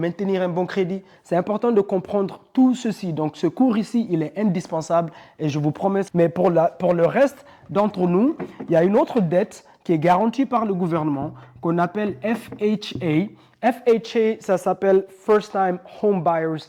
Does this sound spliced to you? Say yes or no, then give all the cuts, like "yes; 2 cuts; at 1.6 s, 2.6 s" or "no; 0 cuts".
yes; 1 cut; at 6.1 s